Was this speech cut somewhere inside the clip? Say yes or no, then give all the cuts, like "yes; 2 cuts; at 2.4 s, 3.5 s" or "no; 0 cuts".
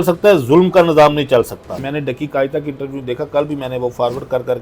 yes; 1 cut; at 1.9 s